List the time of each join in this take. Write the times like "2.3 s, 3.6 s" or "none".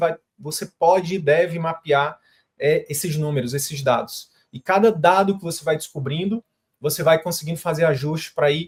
none